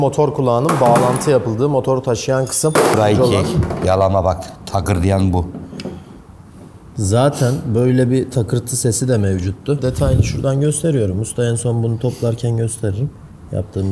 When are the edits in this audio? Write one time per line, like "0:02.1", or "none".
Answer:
0:02.9
0:09.8